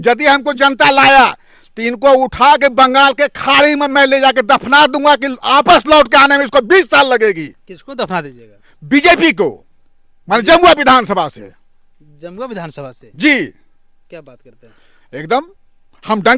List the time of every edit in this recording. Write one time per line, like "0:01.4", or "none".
none